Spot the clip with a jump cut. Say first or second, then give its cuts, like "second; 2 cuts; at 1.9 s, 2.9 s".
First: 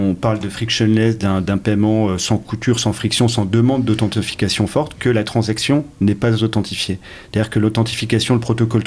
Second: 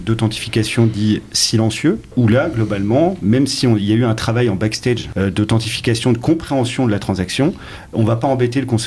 second; 2 cuts; at 2.1 s, 5.1 s